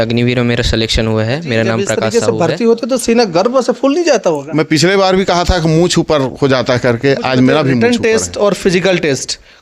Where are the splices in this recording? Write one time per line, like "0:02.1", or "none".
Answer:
0:02.0
0:07.8

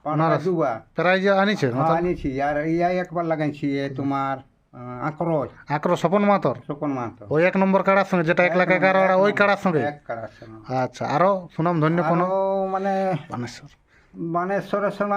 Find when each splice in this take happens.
none

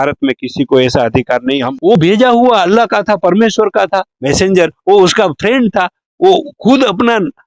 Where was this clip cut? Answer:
0:01.6

